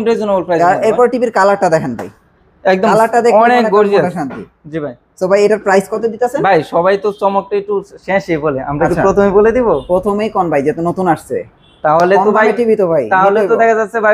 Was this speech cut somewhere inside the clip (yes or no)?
no